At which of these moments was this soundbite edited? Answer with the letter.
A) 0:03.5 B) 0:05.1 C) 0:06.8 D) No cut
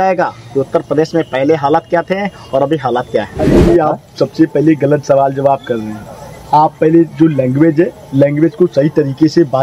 A